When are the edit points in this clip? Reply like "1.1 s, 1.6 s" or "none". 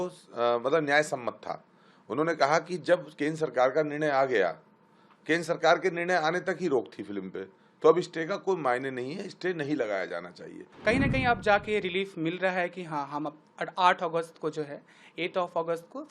10.7 s